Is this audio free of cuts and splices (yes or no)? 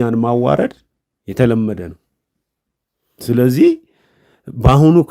yes